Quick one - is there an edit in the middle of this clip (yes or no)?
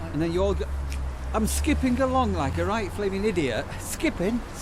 no